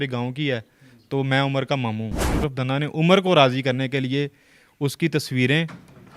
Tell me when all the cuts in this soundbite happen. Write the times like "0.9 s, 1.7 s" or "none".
2.4 s